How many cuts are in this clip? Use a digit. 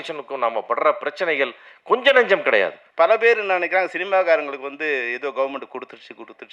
1